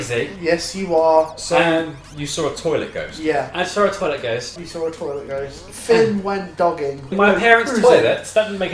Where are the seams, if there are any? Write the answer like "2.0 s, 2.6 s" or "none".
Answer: 4.5 s, 5.7 s, 7.1 s